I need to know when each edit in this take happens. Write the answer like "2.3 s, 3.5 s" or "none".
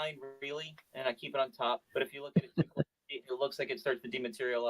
1.9 s

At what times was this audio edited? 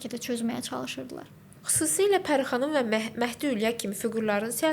none

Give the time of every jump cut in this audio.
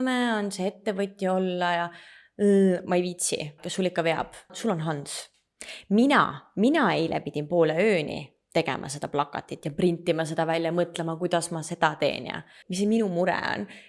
3.6 s, 4.6 s, 12.6 s

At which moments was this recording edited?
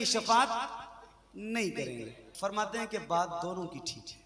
2.2 s

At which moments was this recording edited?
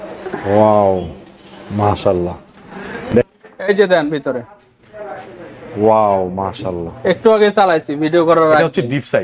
3.1 s

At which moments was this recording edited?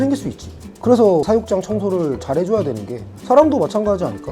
1.2 s

